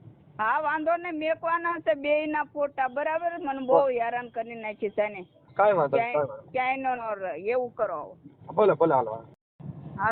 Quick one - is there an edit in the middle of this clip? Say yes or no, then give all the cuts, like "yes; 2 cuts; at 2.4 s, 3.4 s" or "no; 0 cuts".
no; 0 cuts